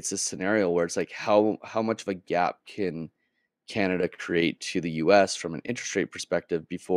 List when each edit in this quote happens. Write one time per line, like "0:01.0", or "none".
none